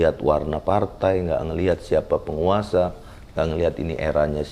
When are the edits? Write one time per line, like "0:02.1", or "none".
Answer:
none